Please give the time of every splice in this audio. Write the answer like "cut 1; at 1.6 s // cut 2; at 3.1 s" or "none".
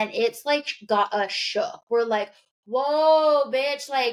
none